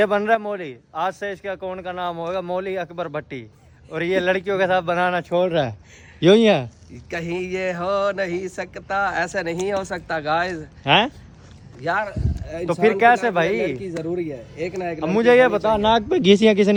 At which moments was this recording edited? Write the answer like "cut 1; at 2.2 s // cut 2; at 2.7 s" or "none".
none